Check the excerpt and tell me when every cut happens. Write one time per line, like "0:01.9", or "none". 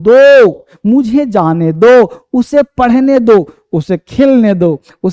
none